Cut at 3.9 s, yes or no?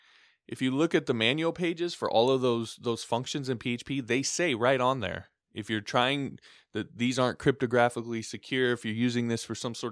no